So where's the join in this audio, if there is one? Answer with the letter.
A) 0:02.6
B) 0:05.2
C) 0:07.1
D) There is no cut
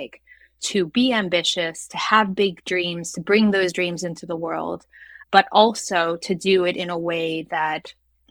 B